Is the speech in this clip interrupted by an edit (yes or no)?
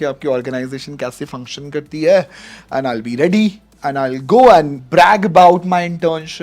yes